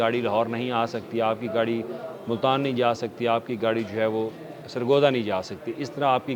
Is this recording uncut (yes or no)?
yes